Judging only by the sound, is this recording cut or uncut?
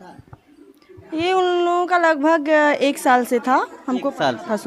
uncut